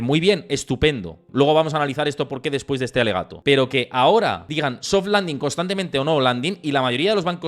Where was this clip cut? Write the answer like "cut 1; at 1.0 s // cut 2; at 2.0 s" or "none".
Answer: cut 1; at 1.2 s // cut 2; at 3.3 s // cut 3; at 4.4 s